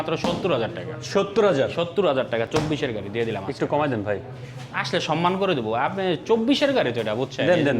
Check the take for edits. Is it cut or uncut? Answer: uncut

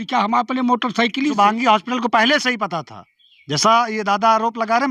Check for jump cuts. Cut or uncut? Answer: cut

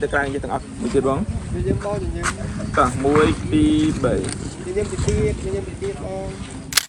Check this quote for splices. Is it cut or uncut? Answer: uncut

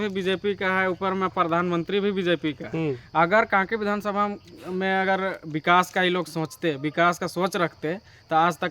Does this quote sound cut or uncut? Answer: uncut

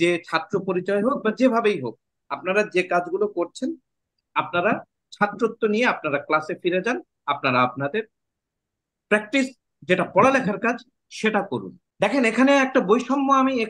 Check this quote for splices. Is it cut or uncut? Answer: cut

